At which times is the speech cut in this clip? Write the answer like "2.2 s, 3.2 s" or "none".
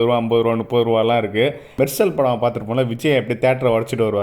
1.7 s